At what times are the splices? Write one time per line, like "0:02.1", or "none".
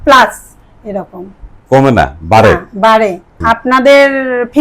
0:03.3

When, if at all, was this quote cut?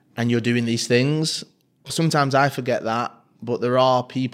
0:01.9

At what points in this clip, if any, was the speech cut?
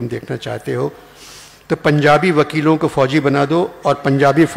none

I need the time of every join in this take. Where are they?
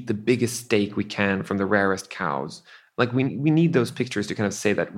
0:03.3

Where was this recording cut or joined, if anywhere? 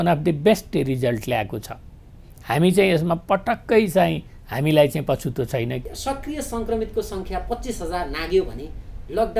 0:05.8

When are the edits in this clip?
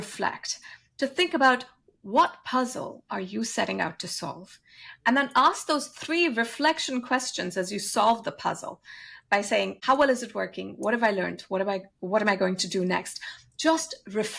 0:09.8

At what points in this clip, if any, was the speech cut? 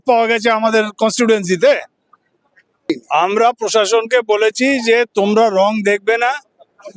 0:02.9

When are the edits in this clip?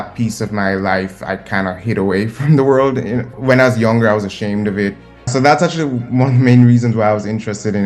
0:03.3
0:05.3

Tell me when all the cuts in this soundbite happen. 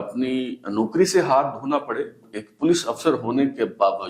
0:02.2

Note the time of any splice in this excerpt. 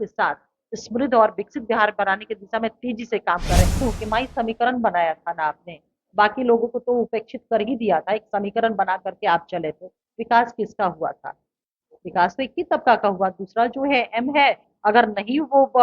0:03.8

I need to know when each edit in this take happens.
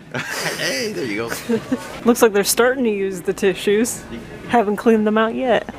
none

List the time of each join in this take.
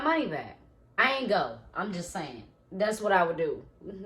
0:01.0

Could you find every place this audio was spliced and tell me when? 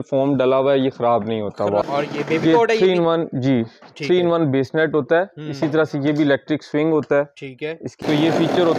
0:01.8
0:08.0

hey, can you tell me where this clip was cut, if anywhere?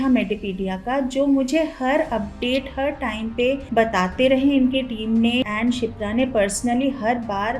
0:05.5

